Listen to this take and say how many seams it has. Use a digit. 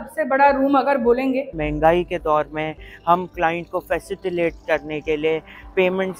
1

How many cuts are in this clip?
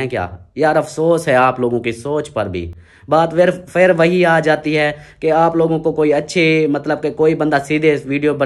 0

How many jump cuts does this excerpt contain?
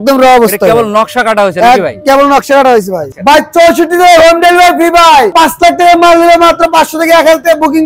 1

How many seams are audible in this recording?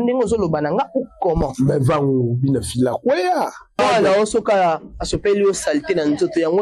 1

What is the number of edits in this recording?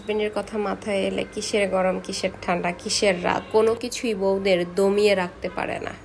0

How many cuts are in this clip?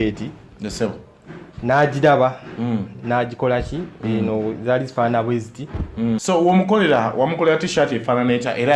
1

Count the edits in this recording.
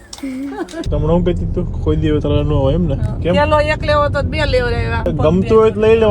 3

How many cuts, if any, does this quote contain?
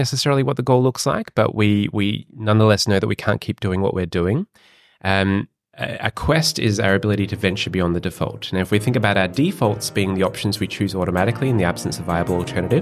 0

